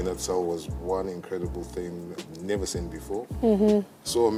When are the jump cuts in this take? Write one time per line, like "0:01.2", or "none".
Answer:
none